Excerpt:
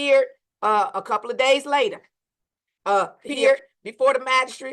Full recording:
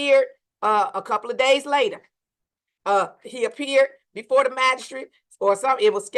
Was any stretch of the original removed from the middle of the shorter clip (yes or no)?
yes